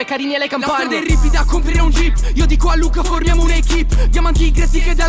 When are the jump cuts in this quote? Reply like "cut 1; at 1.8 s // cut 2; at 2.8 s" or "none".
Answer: none